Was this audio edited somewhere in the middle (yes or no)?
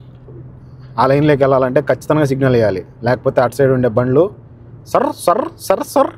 no